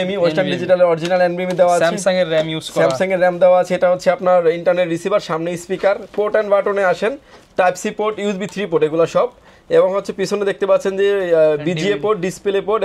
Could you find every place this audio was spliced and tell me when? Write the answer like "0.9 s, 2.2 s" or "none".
none